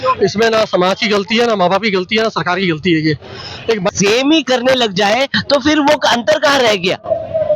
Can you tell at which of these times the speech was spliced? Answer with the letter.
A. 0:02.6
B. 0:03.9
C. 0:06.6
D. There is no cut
B